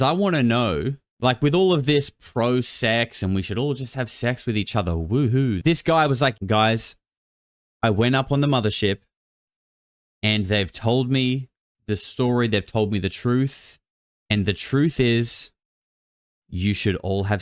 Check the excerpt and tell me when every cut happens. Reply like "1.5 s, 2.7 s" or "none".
5.6 s, 6.4 s

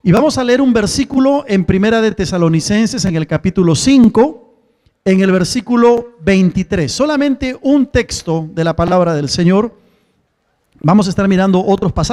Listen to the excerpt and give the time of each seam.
none

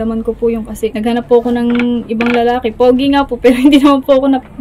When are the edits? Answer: 0.9 s

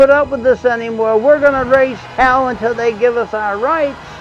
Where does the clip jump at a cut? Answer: none

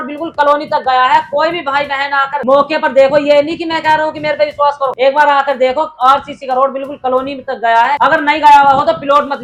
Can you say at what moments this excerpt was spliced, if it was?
none

